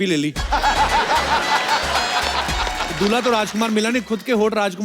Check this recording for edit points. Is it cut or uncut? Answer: uncut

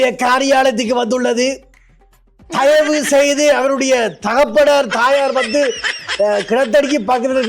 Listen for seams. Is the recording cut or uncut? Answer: uncut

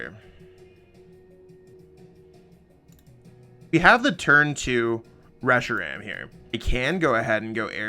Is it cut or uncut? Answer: cut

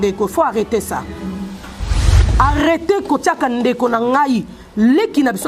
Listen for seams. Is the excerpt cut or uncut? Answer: cut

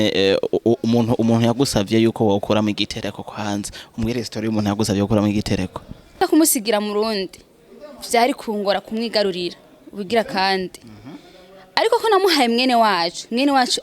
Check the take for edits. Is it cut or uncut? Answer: cut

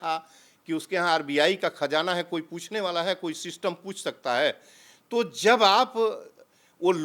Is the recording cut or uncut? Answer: uncut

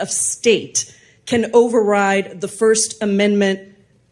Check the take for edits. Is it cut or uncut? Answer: uncut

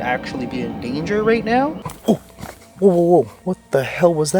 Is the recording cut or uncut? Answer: cut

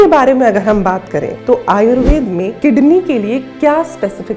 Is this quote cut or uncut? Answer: cut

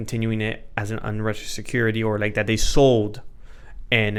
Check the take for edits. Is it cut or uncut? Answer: uncut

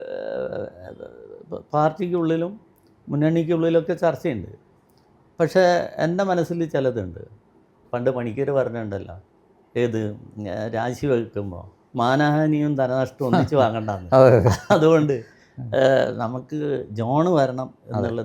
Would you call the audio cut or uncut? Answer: cut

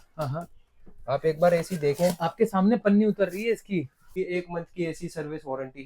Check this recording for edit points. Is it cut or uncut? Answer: cut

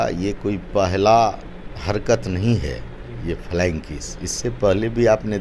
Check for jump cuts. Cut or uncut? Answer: uncut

